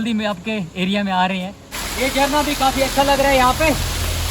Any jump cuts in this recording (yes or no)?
yes